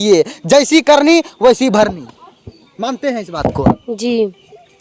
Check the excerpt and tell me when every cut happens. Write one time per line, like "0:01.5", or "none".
none

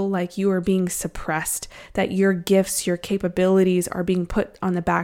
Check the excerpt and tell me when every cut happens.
none

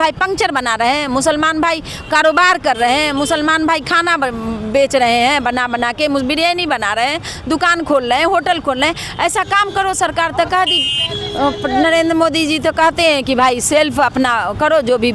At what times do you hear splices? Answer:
none

